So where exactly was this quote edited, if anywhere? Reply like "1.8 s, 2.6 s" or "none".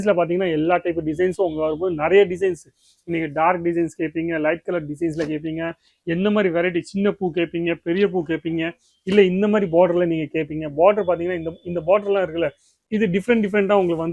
none